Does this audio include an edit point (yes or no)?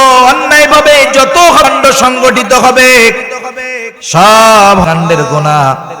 yes